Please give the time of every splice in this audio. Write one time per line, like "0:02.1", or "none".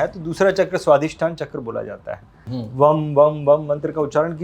0:02.5